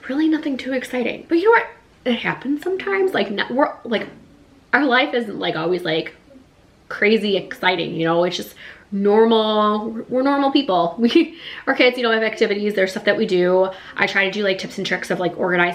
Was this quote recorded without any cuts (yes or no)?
yes